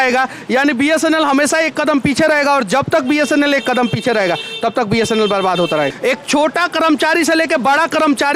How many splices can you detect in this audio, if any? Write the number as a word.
one